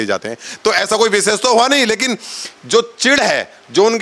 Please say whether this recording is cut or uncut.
uncut